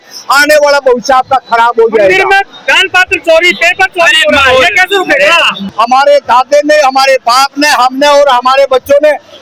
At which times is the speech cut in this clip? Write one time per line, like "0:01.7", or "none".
none